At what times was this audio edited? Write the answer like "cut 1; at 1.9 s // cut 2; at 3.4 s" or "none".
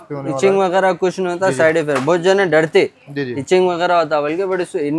none